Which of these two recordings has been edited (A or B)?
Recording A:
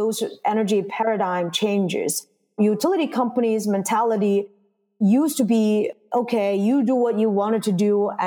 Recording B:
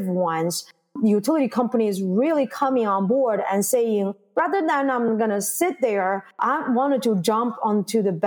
B